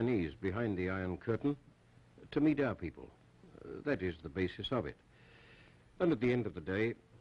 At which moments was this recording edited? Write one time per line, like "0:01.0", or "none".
none